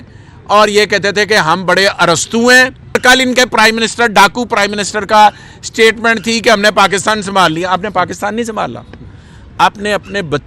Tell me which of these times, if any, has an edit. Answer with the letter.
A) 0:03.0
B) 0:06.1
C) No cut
A